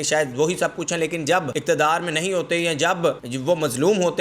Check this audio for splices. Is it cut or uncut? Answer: cut